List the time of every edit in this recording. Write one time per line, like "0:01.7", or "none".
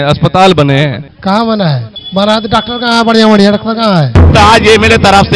0:01.1
0:01.9
0:04.3